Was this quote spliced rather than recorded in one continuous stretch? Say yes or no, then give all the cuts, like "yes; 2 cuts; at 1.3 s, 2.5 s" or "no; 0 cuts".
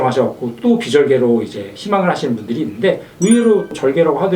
yes; 1 cut; at 3.1 s